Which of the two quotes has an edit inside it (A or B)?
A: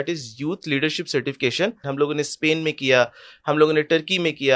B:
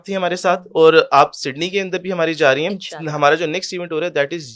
A